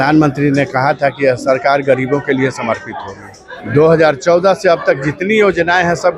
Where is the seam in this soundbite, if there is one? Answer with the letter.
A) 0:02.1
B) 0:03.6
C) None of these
B